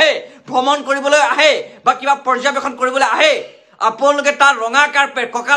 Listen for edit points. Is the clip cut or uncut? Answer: uncut